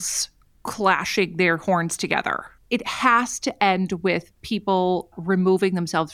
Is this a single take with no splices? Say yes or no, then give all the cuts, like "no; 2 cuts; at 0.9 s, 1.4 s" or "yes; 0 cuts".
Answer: no; 2 cuts; at 2.6 s, 5.1 s